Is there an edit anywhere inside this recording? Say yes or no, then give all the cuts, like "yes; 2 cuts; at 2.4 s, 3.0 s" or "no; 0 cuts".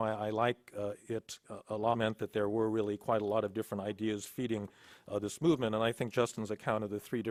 no; 0 cuts